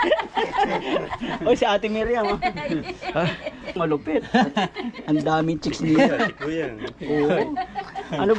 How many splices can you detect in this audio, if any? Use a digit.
1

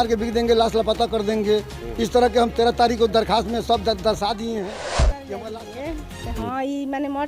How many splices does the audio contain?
1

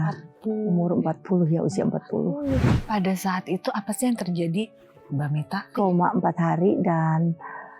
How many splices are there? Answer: 2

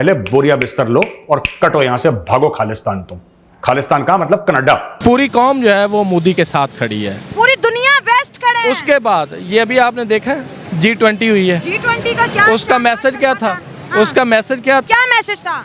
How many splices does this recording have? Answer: 1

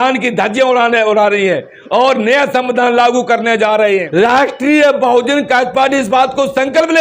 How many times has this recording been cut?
1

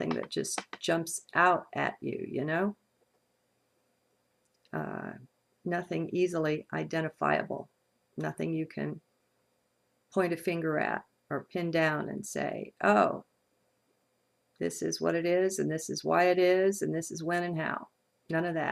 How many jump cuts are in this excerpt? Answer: 0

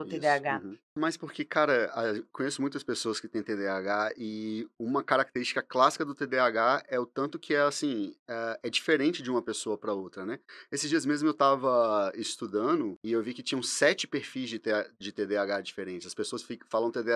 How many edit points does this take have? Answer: 2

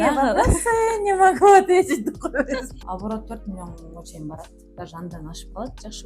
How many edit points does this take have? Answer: 1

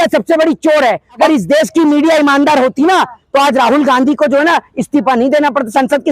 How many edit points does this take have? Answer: 1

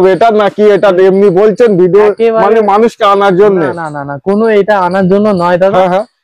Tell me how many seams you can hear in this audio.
0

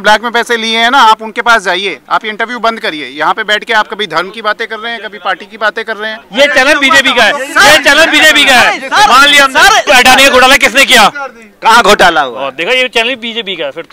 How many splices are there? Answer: 2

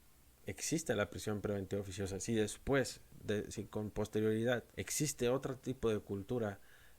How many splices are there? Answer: 2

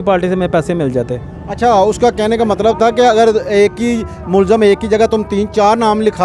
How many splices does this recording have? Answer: 0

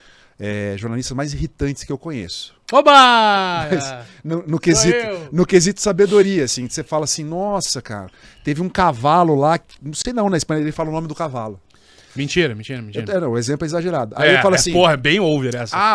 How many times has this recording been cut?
0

